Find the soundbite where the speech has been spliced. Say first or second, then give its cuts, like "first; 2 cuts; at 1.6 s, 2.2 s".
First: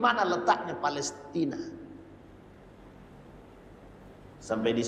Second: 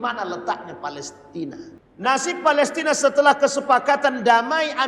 second; 1 cut; at 1.8 s